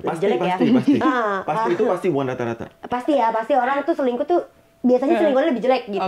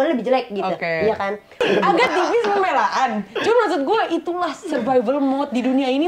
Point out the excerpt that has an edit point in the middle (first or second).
second